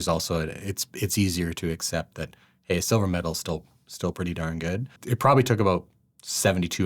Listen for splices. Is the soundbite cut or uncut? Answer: cut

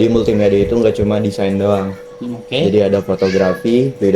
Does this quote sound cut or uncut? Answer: uncut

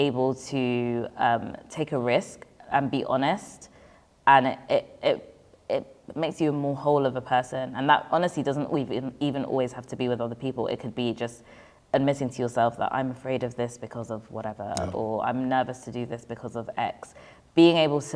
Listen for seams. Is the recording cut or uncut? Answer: uncut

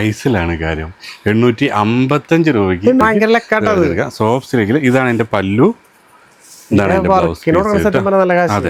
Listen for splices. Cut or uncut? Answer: uncut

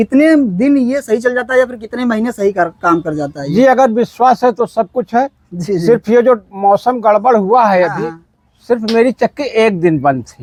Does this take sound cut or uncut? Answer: uncut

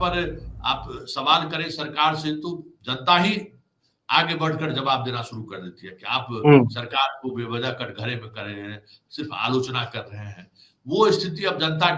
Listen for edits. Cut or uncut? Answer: uncut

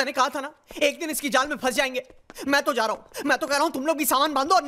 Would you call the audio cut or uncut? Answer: uncut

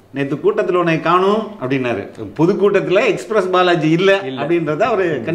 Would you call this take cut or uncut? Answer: uncut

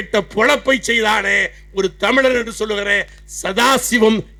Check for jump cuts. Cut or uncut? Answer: uncut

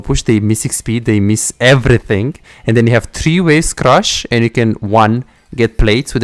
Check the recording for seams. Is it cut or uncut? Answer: uncut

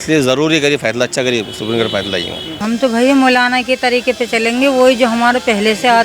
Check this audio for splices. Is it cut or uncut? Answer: cut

